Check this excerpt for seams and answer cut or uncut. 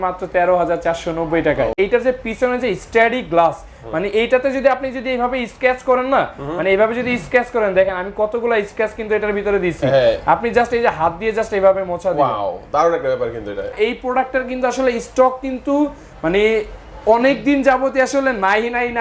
cut